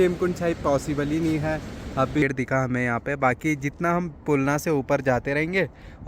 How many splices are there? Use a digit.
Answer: 1